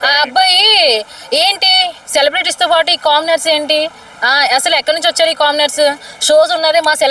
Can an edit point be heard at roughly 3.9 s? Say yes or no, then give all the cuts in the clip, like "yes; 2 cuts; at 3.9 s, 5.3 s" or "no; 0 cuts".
no; 0 cuts